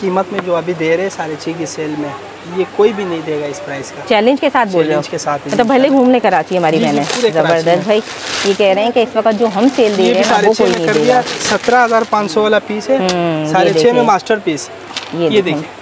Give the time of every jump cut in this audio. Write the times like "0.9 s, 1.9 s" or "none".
none